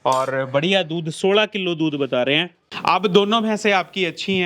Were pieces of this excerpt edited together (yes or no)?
yes